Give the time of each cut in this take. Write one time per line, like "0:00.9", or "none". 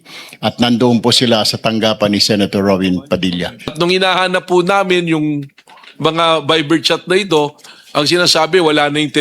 0:03.7